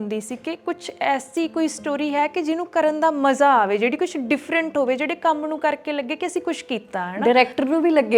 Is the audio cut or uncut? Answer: uncut